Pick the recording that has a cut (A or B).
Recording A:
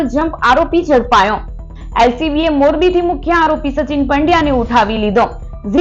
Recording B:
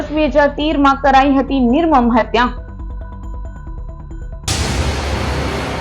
B